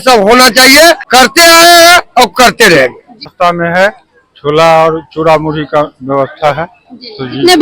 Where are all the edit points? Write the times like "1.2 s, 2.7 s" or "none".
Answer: 1.0 s, 3.3 s